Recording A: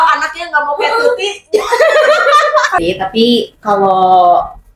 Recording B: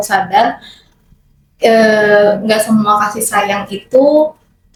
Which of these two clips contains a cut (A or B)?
A